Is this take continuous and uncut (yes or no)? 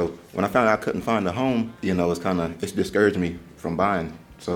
yes